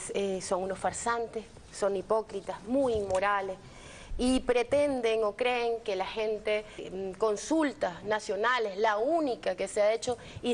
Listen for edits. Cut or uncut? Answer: uncut